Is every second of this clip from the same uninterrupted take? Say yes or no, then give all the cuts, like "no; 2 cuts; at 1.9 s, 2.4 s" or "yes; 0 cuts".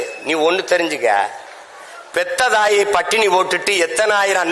yes; 0 cuts